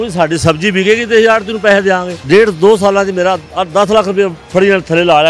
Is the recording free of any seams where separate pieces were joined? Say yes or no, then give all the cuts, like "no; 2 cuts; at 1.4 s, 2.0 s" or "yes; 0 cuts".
no; 1 cut; at 2.1 s